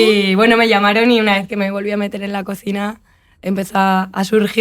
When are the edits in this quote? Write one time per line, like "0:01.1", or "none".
none